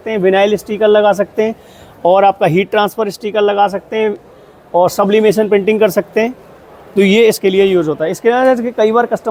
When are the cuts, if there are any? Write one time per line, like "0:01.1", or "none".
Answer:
none